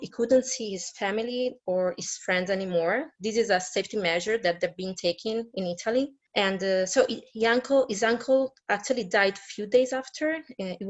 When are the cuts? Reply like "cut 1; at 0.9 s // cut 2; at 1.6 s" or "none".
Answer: cut 1; at 6.2 s